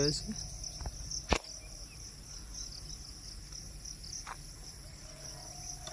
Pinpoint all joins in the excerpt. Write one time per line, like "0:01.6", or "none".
none